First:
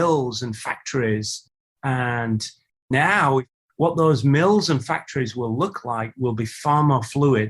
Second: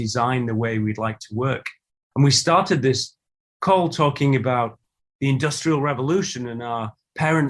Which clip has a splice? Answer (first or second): first